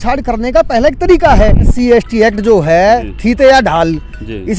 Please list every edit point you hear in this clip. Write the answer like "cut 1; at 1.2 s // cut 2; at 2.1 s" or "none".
cut 1; at 1.7 s